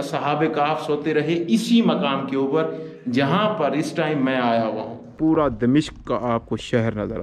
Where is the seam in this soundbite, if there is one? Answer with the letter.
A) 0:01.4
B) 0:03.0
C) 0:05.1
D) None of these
C